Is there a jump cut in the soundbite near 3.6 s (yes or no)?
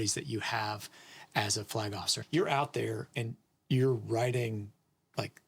no